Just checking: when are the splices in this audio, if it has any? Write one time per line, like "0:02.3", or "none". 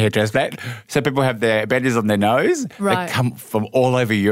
none